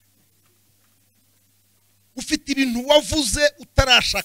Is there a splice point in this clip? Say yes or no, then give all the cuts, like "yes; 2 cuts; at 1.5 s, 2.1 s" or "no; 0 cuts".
no; 0 cuts